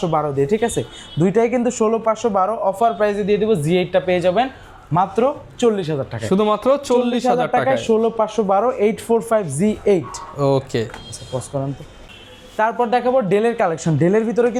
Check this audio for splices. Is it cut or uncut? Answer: uncut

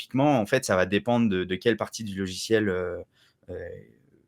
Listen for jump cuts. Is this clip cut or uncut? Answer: uncut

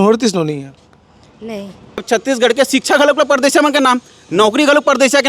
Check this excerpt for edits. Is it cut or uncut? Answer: cut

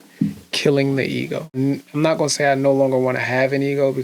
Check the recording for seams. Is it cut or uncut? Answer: cut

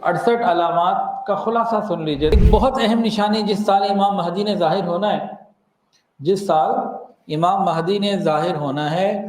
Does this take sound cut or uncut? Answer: cut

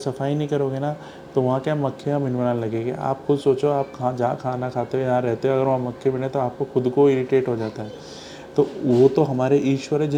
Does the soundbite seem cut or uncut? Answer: uncut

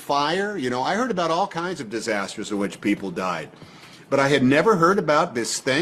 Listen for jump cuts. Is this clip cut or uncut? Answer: uncut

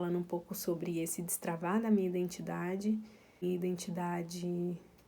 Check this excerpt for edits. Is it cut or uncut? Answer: cut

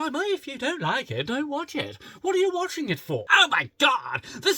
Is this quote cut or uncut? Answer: cut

